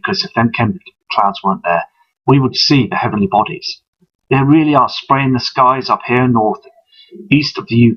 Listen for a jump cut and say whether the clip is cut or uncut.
uncut